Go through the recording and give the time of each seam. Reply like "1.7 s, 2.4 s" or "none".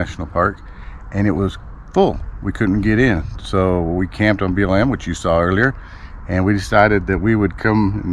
none